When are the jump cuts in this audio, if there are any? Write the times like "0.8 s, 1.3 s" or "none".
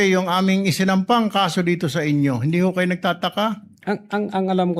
none